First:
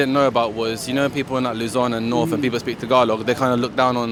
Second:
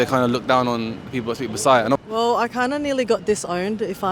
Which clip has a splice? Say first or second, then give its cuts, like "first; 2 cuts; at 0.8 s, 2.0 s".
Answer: second; 1 cut; at 2.0 s